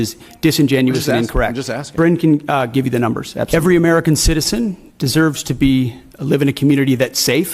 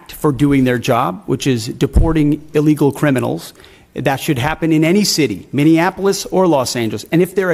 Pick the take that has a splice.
first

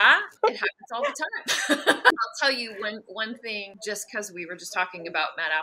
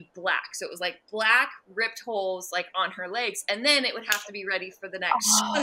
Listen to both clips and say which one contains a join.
first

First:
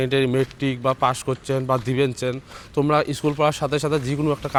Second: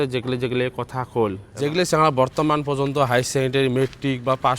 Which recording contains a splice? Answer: second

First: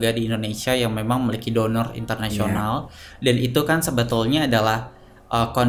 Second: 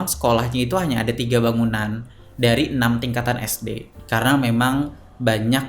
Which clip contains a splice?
second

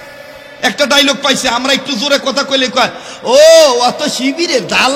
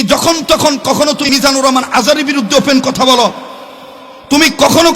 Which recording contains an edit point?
second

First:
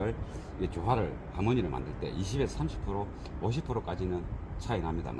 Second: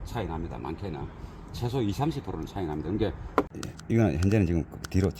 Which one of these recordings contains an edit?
second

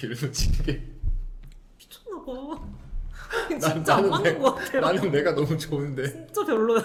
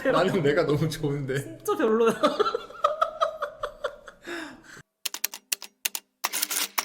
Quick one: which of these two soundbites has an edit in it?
second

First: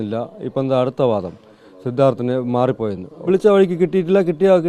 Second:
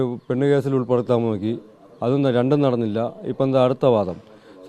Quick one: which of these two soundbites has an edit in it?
first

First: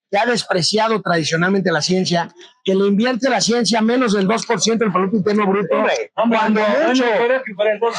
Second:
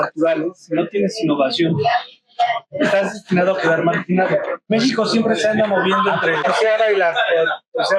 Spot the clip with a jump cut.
second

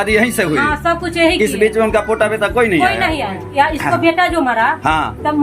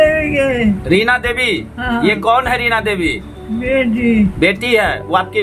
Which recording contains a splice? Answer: first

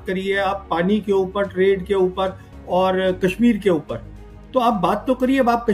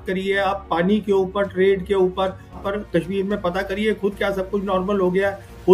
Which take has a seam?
second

